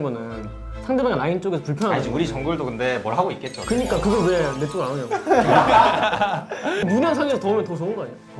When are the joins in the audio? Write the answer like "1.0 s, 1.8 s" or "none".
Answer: 6.8 s